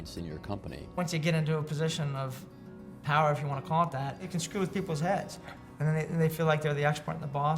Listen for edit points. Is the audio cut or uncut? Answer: cut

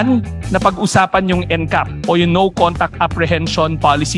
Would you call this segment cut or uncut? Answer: uncut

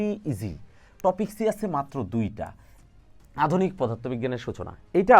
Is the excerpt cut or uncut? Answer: cut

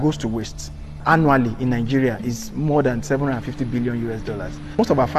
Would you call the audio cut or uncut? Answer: cut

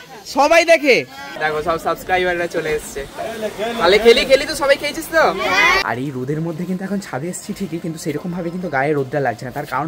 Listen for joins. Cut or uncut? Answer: cut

